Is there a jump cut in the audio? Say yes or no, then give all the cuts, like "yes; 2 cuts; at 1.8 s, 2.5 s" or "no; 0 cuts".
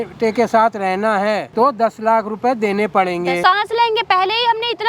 yes; 2 cuts; at 1.5 s, 3.4 s